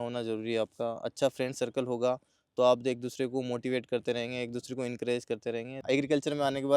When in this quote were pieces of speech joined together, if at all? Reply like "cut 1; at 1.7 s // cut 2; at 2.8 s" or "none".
cut 1; at 5.8 s